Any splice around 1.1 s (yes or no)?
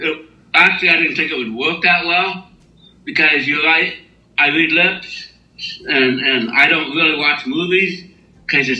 no